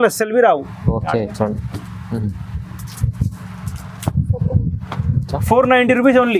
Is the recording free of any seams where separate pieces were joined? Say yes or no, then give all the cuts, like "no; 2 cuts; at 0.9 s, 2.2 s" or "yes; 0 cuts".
yes; 0 cuts